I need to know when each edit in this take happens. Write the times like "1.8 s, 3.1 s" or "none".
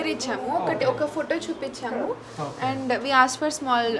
none